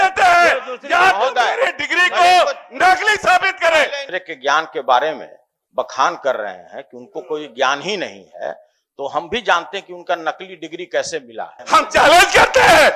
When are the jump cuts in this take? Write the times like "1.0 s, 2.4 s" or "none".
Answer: 4.0 s, 11.6 s